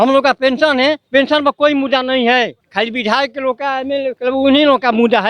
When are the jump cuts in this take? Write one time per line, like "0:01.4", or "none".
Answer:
0:01.0
0:02.6
0:04.2